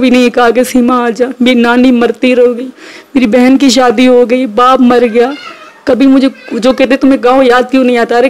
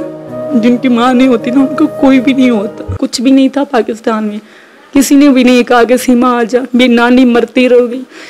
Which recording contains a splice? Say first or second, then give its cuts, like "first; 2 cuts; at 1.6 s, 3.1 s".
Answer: second; 1 cut; at 2.9 s